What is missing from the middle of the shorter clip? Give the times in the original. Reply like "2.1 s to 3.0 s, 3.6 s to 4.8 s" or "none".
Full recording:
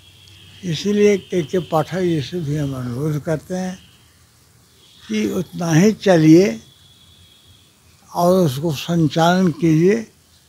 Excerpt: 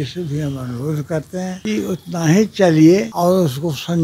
3.8 s to 5.1 s, 6.6 s to 8.1 s